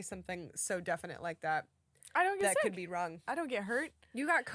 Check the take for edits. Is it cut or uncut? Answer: cut